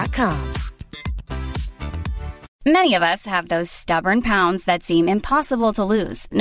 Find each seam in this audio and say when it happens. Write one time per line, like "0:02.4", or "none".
0:02.5